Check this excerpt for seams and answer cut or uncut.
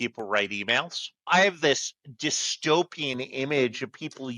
cut